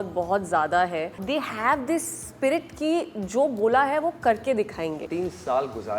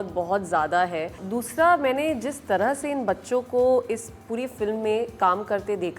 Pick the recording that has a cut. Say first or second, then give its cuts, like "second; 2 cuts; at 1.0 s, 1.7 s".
first; 2 cuts; at 1.2 s, 5.0 s